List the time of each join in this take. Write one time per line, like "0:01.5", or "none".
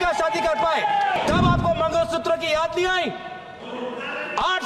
0:01.2